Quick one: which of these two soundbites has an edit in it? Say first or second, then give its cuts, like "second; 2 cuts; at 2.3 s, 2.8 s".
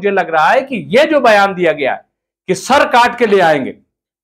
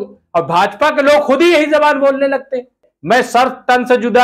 second; 1 cut; at 2.9 s